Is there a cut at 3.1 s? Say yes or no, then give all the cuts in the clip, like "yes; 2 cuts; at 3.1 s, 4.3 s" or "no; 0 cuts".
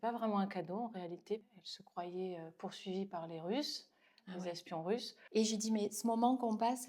no; 2 cuts; at 1.6 s, 5.2 s